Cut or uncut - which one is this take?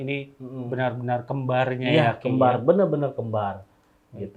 uncut